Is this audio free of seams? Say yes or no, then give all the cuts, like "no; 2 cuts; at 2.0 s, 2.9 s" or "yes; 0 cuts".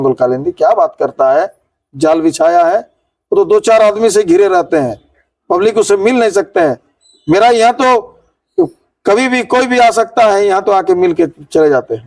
yes; 0 cuts